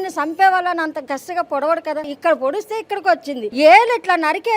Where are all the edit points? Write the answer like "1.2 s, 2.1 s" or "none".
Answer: 2.1 s, 3.5 s

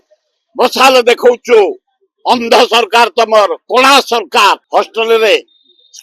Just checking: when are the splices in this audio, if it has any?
4.6 s

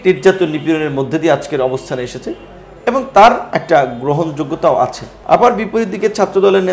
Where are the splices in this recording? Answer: 5.1 s

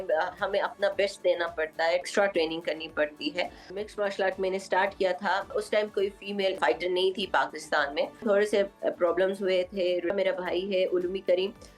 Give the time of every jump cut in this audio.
2.0 s, 3.7 s, 5.5 s, 6.6 s, 8.2 s, 10.1 s

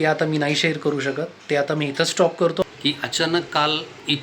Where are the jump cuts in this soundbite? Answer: 2.6 s

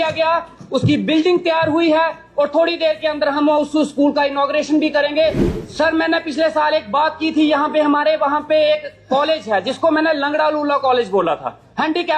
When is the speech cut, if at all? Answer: 5.5 s

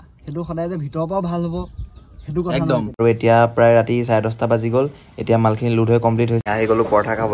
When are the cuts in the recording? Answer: 3.0 s, 6.4 s

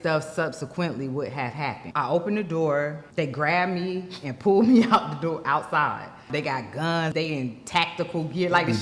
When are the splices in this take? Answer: 1.8 s, 3.0 s, 6.2 s, 7.1 s

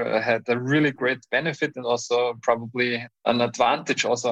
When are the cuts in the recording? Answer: 3.2 s

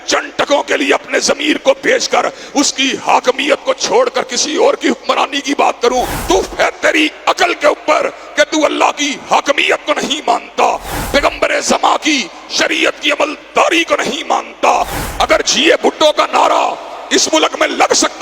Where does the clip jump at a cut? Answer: 6.1 s, 10.9 s, 15.0 s

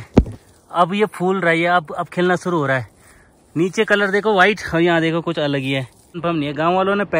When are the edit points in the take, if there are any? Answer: 6.2 s

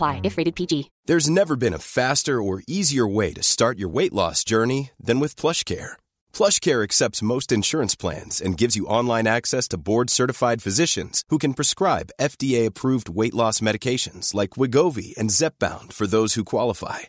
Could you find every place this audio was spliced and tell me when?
0.9 s

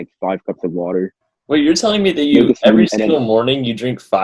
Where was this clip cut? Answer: 1.3 s

